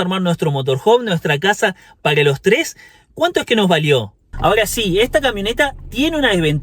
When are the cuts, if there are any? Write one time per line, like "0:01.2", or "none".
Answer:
0:04.2